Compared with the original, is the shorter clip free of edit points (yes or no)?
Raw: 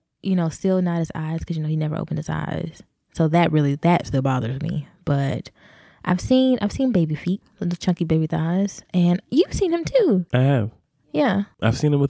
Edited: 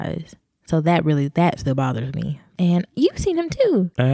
no